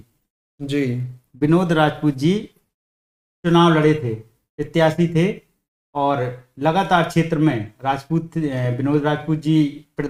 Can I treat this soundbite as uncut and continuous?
yes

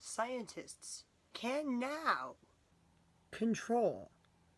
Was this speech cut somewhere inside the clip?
yes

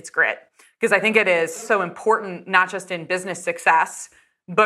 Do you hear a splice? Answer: yes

